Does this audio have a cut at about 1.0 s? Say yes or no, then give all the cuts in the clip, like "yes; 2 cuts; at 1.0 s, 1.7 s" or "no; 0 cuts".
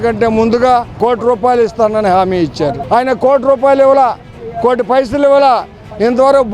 yes; 2 cuts; at 1.0 s, 2.8 s